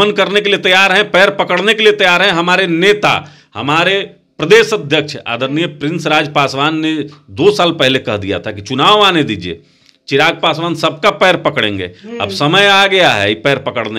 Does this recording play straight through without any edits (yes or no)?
yes